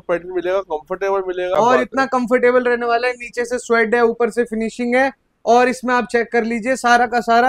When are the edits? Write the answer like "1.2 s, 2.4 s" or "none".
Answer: 1.5 s